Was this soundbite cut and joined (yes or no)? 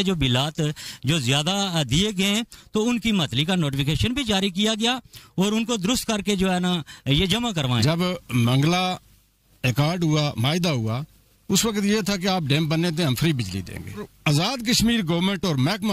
yes